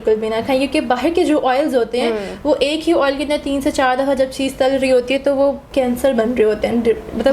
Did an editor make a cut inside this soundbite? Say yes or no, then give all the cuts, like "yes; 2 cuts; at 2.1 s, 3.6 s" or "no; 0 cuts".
yes; 1 cut; at 5.6 s